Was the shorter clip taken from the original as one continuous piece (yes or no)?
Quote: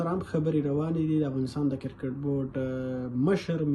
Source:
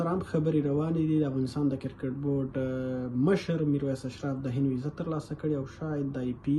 yes